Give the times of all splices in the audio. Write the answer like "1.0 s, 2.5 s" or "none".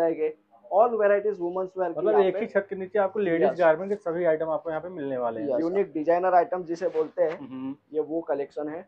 5.6 s

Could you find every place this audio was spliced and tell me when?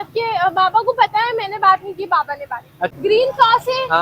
2.9 s

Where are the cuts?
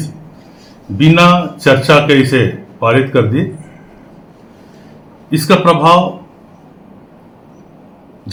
none

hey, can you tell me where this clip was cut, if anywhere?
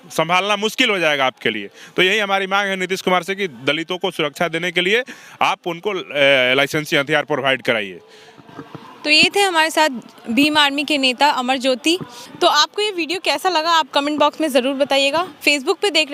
none

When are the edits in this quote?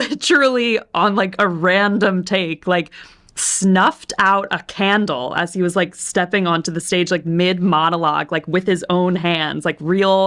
none

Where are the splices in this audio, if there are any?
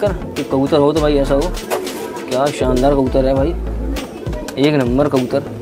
none

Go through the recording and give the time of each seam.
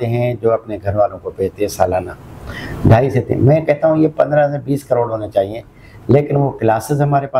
none

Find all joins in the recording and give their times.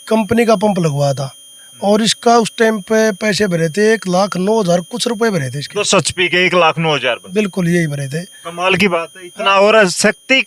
none

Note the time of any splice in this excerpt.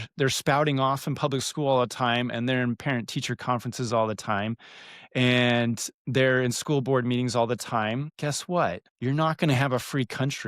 8.1 s, 8.9 s

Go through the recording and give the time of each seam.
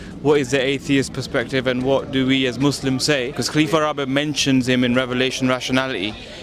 3.4 s

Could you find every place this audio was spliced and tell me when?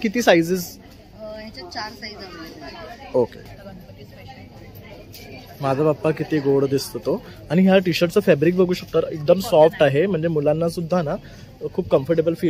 3.5 s

